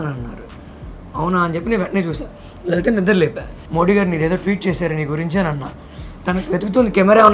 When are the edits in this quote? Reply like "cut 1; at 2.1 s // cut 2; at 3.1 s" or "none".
cut 1; at 3.5 s // cut 2; at 6.0 s